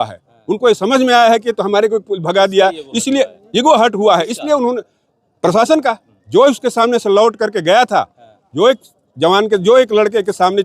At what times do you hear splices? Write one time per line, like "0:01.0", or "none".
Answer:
none